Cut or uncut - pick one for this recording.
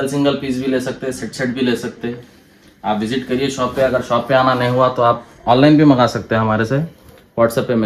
uncut